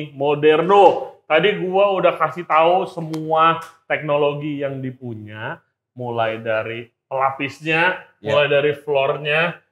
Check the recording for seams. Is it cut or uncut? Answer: uncut